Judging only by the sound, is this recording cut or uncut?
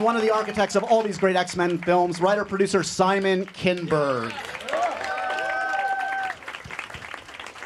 uncut